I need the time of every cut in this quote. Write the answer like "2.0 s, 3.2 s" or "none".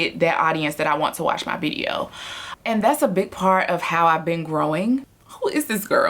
2.6 s, 5.1 s